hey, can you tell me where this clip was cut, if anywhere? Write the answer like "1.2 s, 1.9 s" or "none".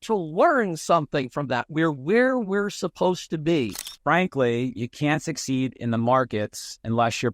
3.9 s